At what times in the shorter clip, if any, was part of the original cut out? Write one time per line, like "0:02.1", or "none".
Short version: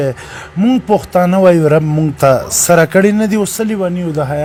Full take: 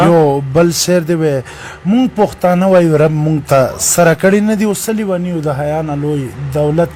none